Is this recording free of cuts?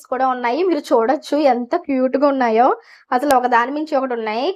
yes; 0 cuts

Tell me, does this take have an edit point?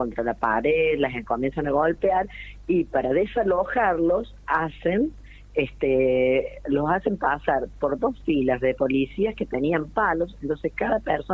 no; 0 cuts

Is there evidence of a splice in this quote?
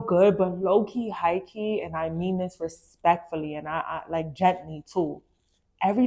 no; 0 cuts

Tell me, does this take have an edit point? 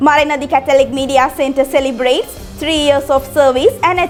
no; 0 cuts

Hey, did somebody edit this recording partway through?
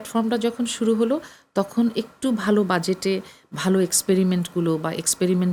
no; 0 cuts

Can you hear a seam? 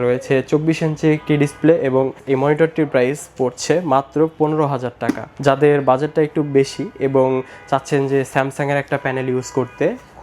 yes; 1 cut; at 5.3 s

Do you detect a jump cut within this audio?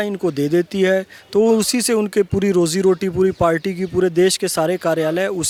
no; 0 cuts

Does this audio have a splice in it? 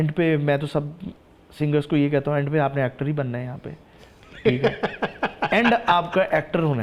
no; 0 cuts

